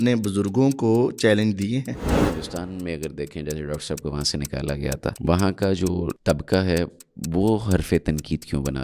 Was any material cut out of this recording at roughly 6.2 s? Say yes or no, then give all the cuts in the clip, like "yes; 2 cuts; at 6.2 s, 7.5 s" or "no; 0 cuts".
yes; 3 cuts; at 2.1 s, 5.1 s, 6.2 s